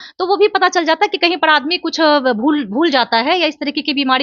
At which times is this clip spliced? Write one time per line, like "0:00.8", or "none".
none